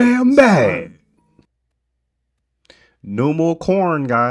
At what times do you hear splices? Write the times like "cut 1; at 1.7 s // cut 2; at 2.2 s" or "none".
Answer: cut 1; at 1.5 s